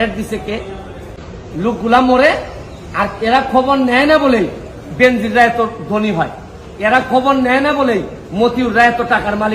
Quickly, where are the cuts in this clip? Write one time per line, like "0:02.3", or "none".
0:01.2